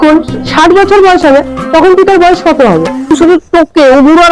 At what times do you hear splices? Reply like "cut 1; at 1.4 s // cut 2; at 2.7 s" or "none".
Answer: none